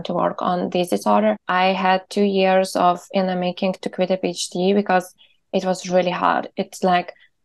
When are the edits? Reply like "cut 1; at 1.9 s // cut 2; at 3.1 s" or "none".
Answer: cut 1; at 1.4 s